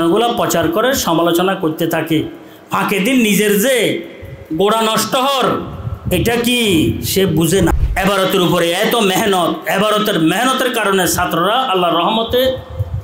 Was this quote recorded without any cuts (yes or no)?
no